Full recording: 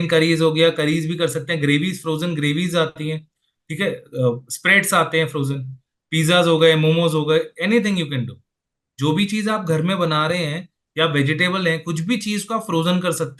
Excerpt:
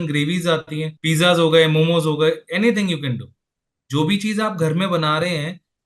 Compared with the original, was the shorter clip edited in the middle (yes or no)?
yes